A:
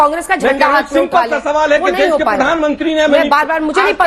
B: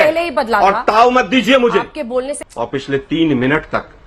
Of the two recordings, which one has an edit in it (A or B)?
B